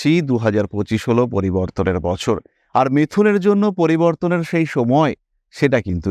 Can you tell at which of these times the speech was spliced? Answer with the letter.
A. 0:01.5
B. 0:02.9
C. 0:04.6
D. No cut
D